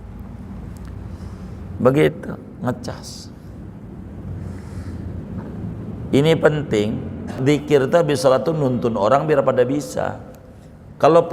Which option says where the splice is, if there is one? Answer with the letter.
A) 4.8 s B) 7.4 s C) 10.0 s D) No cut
B